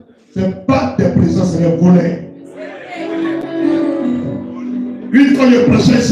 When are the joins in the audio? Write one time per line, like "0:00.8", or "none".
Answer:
none

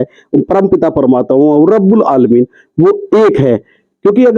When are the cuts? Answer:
none

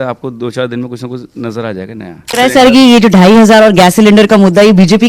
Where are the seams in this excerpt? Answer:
0:02.3

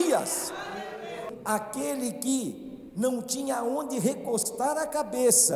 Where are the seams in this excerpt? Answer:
0:01.2

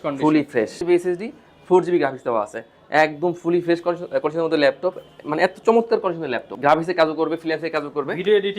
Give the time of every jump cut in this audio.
0:00.8
0:06.5

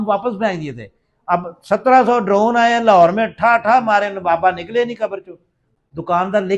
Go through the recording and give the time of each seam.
0:05.7

